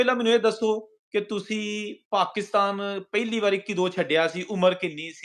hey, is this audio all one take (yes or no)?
yes